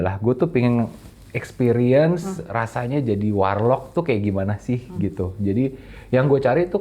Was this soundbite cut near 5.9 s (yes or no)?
no